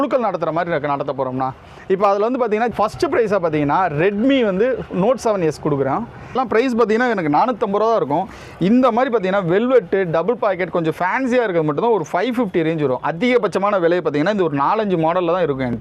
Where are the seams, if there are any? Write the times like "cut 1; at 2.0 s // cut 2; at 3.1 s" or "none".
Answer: cut 1; at 2.7 s // cut 2; at 6.4 s